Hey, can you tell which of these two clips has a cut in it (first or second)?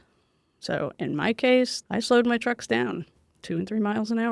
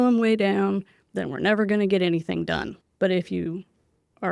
first